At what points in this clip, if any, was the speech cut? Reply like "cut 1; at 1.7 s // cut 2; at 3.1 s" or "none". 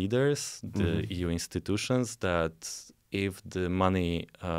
none